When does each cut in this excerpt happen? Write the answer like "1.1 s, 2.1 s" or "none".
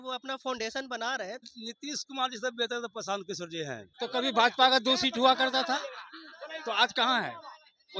1.6 s, 3.9 s